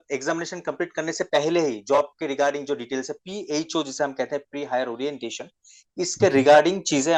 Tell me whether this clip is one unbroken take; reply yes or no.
yes